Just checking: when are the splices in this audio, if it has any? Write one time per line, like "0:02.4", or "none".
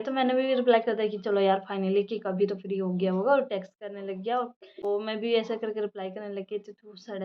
none